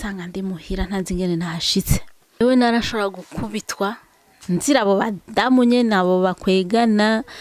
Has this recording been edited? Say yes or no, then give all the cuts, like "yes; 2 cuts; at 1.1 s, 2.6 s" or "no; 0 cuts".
yes; 1 cut; at 2.4 s